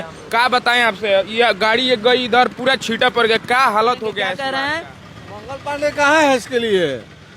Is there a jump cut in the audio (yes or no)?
yes